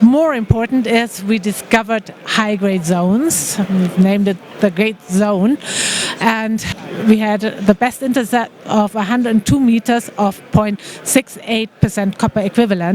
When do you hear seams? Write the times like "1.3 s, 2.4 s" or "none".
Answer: 6.7 s